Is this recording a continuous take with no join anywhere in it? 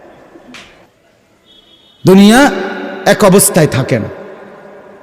no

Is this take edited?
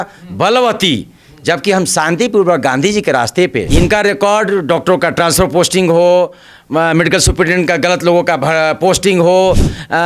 yes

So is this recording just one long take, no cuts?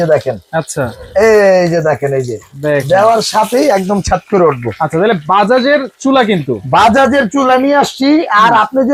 yes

